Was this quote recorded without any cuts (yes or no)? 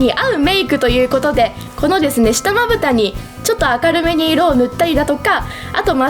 yes